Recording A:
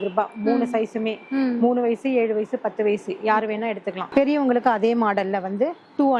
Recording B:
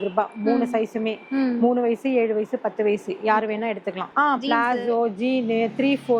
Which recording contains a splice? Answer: B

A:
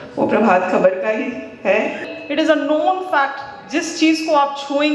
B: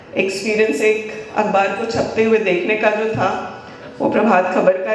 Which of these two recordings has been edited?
A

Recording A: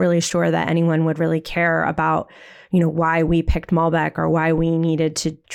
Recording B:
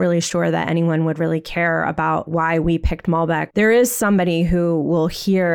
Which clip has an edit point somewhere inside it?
B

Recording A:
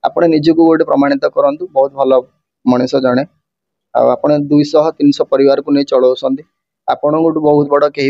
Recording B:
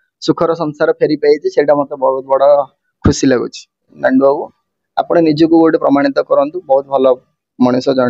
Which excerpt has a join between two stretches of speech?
B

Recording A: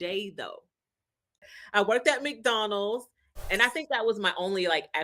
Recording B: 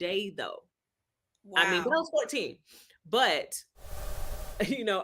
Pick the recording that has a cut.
A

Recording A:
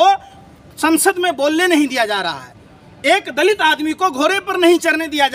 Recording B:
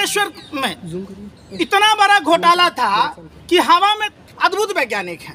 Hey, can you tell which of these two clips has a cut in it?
B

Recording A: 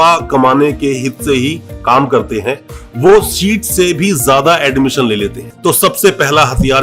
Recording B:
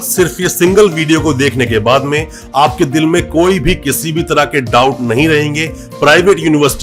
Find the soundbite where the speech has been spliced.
A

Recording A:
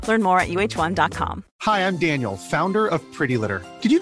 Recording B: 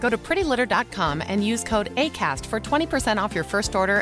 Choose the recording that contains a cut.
A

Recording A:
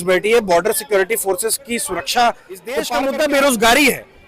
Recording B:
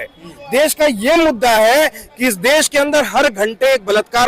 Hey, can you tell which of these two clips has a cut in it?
A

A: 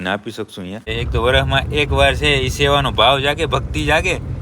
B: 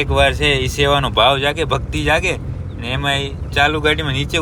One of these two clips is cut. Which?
A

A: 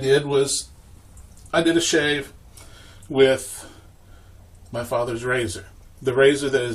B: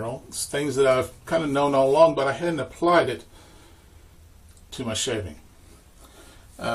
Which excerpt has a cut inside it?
A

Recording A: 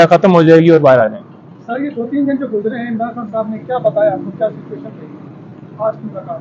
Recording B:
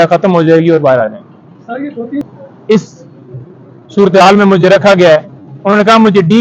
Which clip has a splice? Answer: B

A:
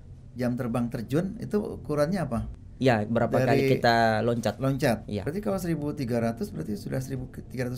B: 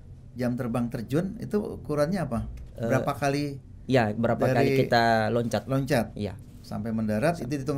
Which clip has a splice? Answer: A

